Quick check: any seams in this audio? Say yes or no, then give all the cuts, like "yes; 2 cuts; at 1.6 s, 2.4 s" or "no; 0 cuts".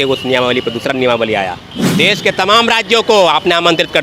yes; 1 cut; at 1.7 s